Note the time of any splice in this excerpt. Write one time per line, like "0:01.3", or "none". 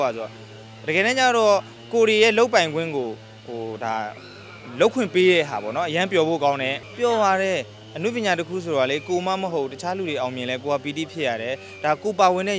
0:06.8